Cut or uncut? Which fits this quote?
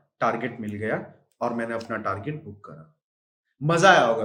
uncut